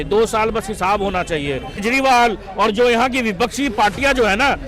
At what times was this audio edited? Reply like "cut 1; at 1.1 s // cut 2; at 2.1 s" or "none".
cut 1; at 1.8 s